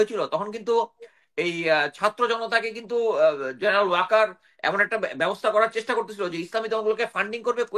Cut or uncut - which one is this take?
uncut